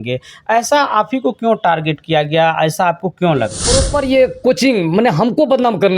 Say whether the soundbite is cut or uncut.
cut